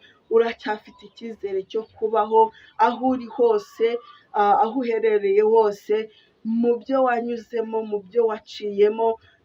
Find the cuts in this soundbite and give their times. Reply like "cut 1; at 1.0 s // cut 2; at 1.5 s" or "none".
none